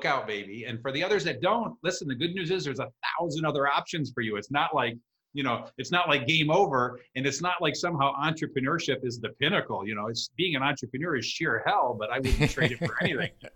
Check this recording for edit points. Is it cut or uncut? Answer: uncut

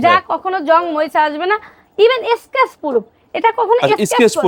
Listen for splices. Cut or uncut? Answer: uncut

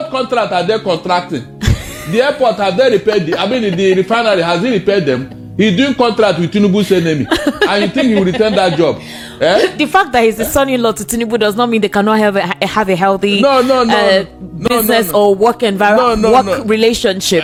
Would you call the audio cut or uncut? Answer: uncut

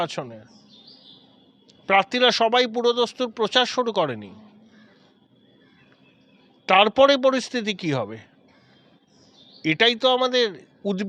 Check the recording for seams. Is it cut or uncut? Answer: uncut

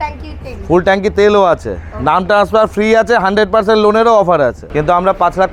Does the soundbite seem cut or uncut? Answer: cut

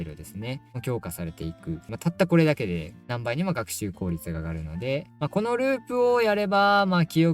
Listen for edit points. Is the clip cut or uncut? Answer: cut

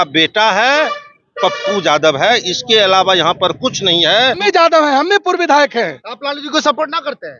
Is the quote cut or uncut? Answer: cut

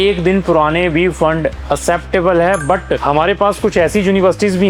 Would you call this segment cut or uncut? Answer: cut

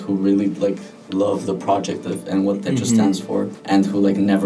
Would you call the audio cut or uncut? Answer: cut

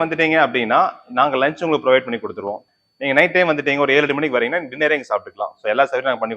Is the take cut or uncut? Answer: cut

